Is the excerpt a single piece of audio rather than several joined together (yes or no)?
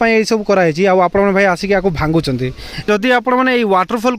no